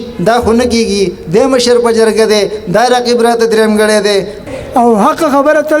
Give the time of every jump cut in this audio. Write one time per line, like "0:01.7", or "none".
0:04.4